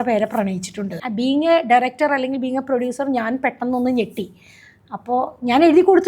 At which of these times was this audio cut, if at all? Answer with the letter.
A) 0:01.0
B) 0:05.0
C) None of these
A